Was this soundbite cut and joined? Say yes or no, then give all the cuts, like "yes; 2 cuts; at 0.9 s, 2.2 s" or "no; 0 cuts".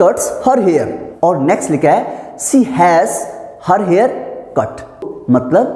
yes; 1 cut; at 1.0 s